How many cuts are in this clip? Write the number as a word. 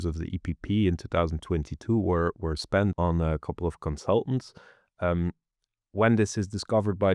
one